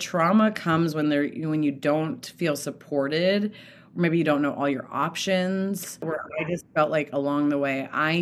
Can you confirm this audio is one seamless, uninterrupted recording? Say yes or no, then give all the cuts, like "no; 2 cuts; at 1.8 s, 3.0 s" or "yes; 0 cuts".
no; 1 cut; at 6.2 s